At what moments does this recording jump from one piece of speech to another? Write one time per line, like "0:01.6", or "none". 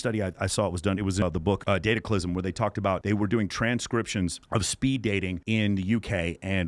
0:01.2